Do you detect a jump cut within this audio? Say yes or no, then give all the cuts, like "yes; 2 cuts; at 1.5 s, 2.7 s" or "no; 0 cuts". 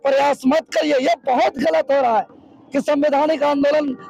no; 0 cuts